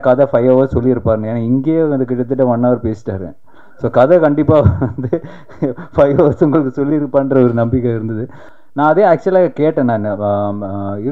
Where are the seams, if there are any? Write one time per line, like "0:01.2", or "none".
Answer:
0:08.4